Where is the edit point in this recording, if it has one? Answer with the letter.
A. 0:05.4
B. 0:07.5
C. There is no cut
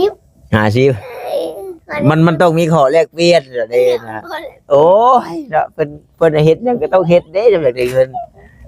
C